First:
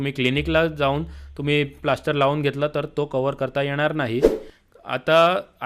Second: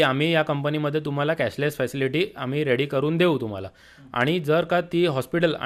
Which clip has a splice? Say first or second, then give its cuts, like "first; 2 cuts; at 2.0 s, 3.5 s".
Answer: first; 1 cut; at 4.5 s